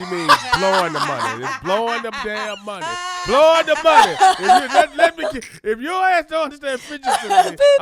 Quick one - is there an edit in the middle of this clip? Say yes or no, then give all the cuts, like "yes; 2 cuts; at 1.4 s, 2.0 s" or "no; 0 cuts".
no; 0 cuts